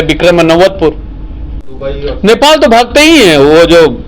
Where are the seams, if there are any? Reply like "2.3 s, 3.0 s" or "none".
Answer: 1.6 s